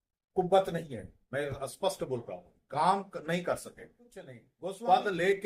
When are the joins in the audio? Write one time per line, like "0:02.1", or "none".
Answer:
0:04.4